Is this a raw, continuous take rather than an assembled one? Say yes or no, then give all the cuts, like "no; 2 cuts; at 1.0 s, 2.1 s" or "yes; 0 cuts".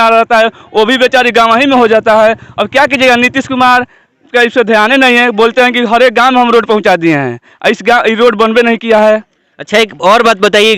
yes; 0 cuts